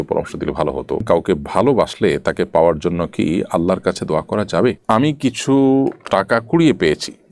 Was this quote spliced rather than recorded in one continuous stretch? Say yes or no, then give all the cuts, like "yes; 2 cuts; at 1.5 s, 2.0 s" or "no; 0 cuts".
yes; 2 cuts; at 1.0 s, 4.8 s